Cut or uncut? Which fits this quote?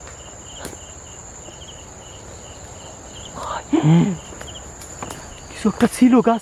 uncut